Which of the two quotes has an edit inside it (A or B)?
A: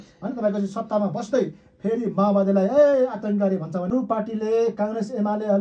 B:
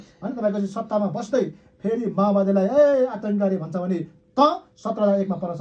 A